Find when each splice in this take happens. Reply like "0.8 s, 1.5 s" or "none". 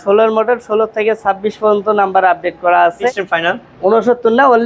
2.9 s

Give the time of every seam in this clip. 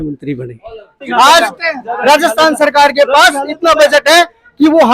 1.0 s

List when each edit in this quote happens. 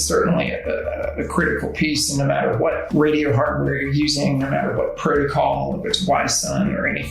2.8 s

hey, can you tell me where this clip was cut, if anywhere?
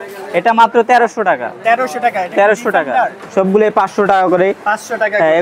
3.2 s

